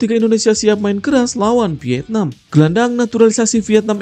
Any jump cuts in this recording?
yes; 1 cut; at 2.4 s

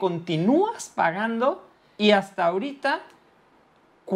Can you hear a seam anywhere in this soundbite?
yes; 1 cut; at 1.9 s

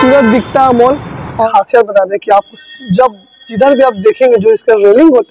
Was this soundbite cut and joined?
yes; 1 cut; at 1.3 s

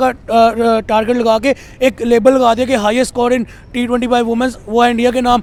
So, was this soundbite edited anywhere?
no; 0 cuts

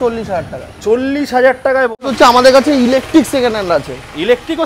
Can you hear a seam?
yes; 1 cut; at 2.0 s

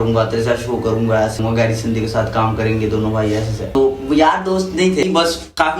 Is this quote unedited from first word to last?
no; 3 cuts; at 1.4 s, 3.7 s, 5.0 s

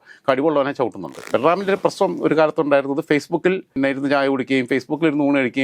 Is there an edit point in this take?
yes; 2 cuts; at 1.3 s, 3.8 s

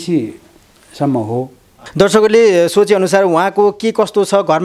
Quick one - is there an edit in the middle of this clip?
yes; 1 cut; at 1.8 s

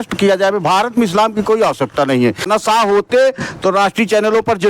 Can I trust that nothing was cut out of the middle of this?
no; 1 cut; at 2.5 s

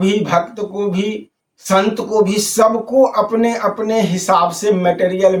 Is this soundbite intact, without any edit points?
yes; 0 cuts

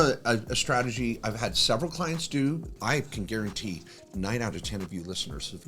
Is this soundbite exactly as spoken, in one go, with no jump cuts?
no; 1 cut; at 2.7 s

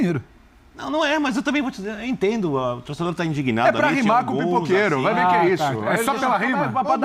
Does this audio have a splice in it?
no; 0 cuts

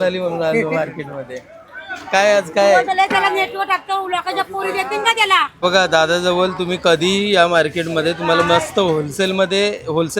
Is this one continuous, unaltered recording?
no; 1 cut; at 5.5 s

